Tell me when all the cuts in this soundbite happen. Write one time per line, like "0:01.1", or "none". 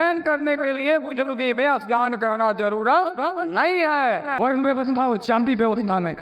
0:04.3